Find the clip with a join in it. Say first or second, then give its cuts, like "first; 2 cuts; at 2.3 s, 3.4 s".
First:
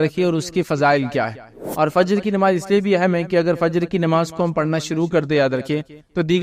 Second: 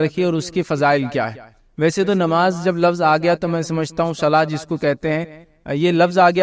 first; 1 cut; at 1.6 s